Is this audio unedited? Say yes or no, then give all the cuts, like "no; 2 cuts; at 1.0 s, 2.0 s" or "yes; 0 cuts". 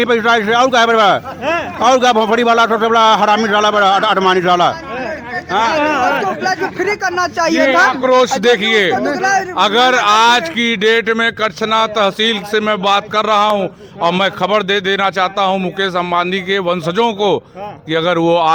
yes; 0 cuts